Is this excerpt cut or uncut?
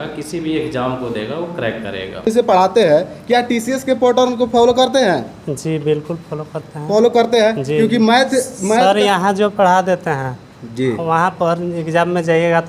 cut